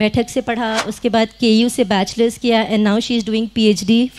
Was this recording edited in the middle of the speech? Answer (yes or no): no